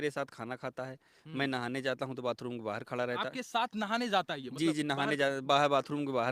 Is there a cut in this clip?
no; 0 cuts

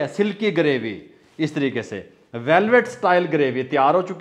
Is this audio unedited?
yes; 0 cuts

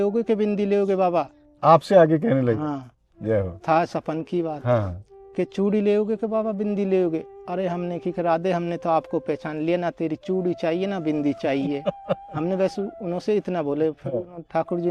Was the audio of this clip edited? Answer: no; 0 cuts

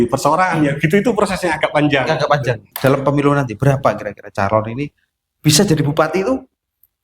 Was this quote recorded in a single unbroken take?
no; 1 cut; at 2.7 s

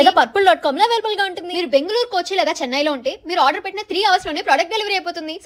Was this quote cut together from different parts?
no; 0 cuts

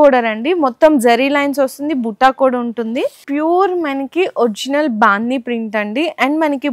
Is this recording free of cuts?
no; 1 cut; at 3.2 s

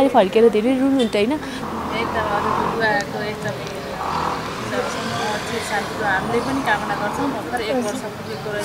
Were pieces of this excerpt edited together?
yes; 1 cut; at 1.5 s

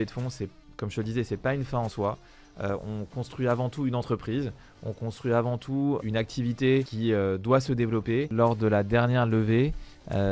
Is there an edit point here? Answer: yes; 3 cuts; at 6.0 s, 6.9 s, 8.3 s

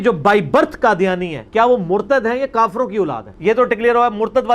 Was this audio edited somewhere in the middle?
yes; 1 cut; at 3.2 s

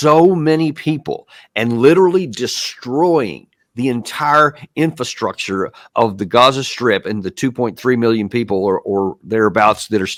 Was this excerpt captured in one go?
yes; 0 cuts

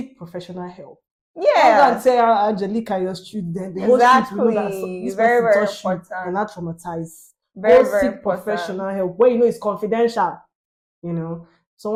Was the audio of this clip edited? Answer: no; 0 cuts

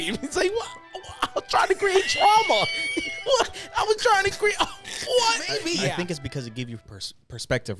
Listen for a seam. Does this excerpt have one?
yes; 1 cut; at 5.5 s

